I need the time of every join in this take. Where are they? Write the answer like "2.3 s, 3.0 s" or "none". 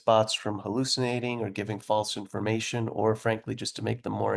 none